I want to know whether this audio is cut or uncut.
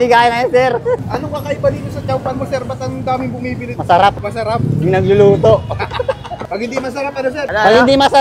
cut